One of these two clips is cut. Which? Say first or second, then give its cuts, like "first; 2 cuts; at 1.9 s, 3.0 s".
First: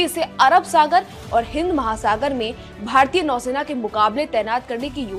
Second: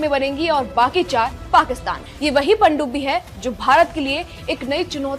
second; 1 cut; at 1.9 s